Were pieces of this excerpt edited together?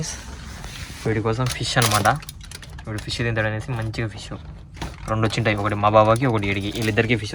no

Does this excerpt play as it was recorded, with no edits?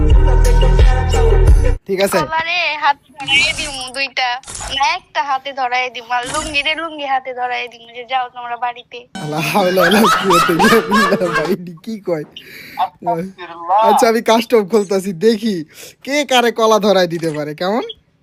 yes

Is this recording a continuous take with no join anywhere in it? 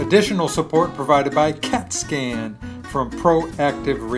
yes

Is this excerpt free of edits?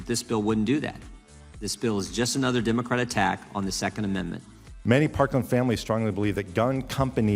yes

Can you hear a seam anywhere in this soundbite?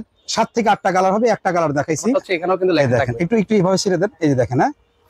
yes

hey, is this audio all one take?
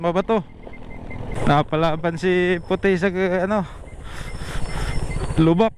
no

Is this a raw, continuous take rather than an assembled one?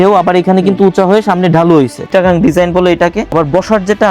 no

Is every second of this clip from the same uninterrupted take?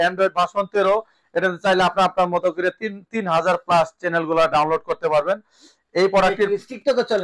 yes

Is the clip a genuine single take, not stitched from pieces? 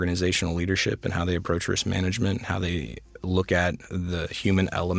yes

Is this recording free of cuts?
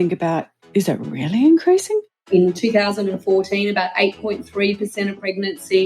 no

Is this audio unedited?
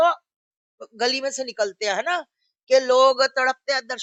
yes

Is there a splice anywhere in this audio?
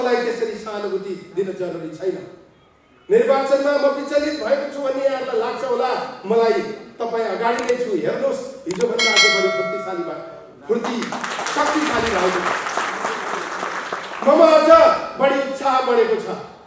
no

